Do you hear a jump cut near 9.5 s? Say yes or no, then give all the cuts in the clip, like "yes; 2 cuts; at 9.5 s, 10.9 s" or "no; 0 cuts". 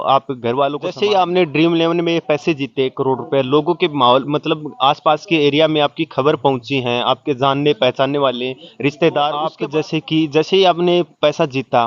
yes; 2 cuts; at 0.9 s, 9.5 s